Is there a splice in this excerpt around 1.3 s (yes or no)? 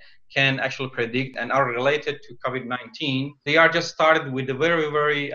yes